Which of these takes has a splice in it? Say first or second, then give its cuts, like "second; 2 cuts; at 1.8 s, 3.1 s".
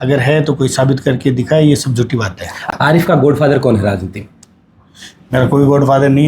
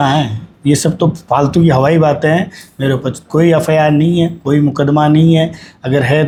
first; 1 cut; at 2.6 s